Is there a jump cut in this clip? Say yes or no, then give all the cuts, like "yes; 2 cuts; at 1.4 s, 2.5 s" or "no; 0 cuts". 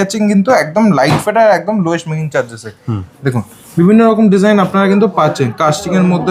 no; 0 cuts